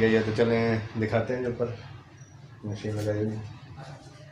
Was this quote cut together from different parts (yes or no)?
no